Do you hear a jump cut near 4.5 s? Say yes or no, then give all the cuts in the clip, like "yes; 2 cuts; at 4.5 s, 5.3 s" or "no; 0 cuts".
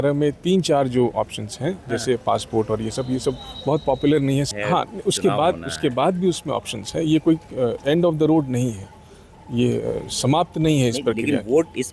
yes; 1 cut; at 4.5 s